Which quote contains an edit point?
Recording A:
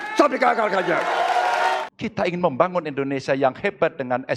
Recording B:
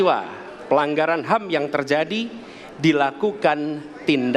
A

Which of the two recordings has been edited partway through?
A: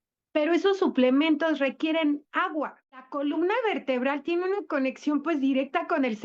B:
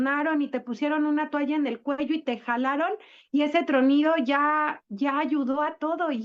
A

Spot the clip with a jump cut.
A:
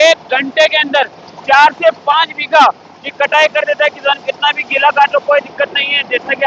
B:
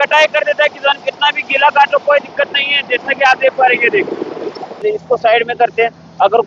B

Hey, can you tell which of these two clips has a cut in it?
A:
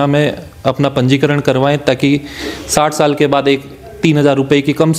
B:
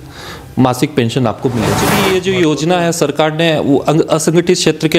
B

